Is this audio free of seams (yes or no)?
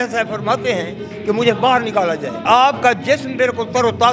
no